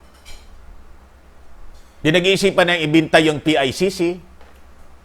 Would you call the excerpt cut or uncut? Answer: uncut